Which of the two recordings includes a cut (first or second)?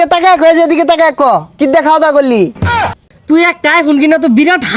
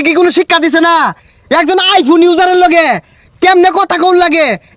first